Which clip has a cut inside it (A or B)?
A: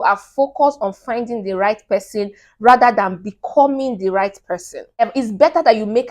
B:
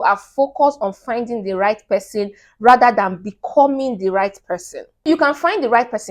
A